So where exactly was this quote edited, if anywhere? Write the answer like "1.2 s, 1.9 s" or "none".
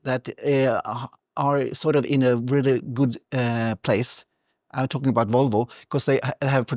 none